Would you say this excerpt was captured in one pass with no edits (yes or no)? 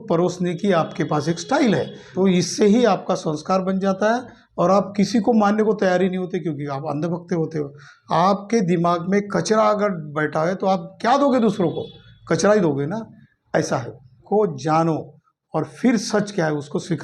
no